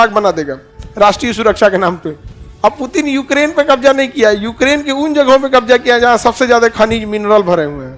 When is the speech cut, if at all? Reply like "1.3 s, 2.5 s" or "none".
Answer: 2.2 s